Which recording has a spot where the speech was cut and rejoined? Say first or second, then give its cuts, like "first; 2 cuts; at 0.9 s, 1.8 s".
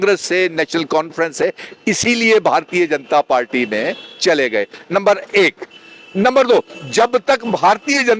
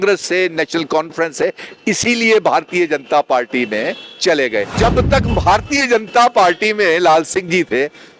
second; 1 cut; at 4.7 s